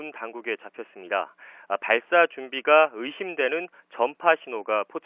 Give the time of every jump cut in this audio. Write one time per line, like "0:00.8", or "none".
none